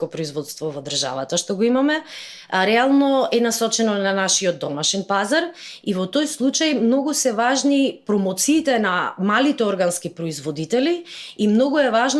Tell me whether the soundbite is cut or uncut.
uncut